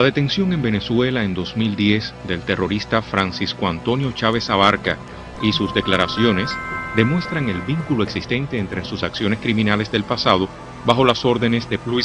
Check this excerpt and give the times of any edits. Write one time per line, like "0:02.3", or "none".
0:04.8